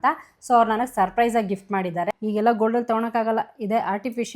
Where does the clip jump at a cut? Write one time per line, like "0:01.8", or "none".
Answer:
0:02.1